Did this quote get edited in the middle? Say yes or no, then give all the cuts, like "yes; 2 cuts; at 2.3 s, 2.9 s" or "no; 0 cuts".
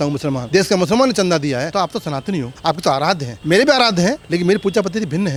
no; 0 cuts